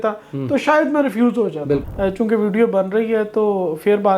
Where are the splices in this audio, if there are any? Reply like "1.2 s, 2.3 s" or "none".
1.8 s